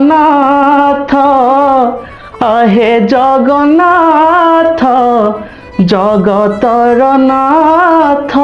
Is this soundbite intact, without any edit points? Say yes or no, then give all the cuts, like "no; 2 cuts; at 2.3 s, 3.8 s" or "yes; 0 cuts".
yes; 0 cuts